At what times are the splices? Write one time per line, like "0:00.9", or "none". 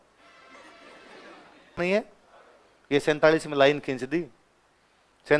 0:01.8